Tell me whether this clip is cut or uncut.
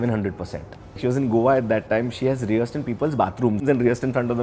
cut